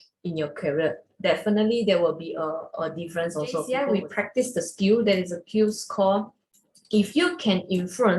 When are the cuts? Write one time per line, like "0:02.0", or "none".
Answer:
0:03.7